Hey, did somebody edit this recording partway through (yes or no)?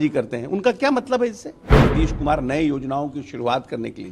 yes